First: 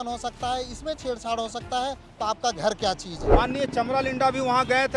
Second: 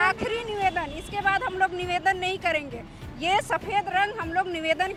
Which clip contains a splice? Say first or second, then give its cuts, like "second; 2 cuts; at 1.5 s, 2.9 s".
first; 1 cut; at 3.3 s